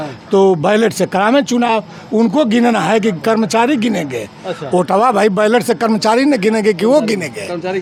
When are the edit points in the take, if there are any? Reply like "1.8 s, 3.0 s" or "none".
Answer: none